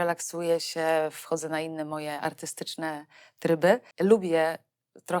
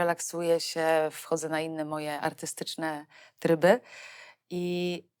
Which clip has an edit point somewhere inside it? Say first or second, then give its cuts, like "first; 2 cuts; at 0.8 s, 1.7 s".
first; 1 cut; at 3.9 s